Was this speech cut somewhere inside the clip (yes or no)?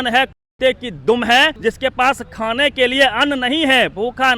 yes